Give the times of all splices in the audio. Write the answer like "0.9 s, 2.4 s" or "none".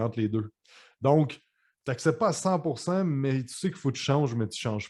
none